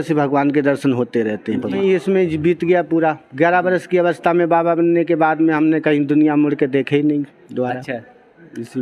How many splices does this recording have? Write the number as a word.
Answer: one